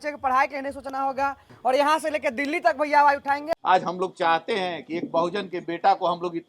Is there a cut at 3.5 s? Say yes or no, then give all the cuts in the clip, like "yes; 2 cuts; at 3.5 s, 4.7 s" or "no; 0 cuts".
yes; 2 cuts; at 1.5 s, 3.5 s